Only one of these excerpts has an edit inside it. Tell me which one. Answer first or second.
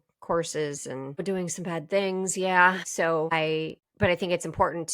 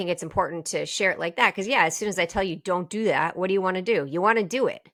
first